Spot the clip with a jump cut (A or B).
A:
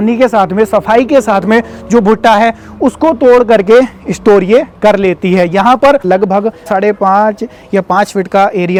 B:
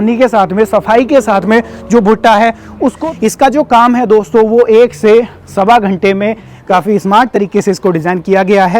B